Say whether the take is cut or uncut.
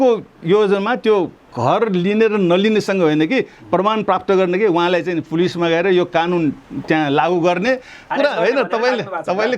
cut